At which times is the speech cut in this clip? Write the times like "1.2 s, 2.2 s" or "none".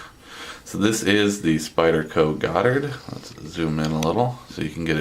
2.9 s